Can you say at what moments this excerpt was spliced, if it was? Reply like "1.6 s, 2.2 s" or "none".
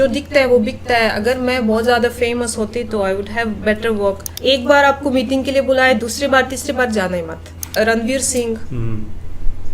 4.3 s, 7.8 s